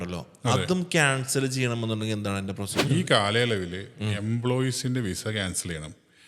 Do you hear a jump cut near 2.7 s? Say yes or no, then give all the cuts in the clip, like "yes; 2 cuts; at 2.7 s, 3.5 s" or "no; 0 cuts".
yes; 1 cut; at 2.7 s